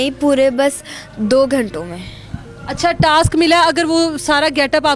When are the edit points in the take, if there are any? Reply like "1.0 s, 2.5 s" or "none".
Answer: none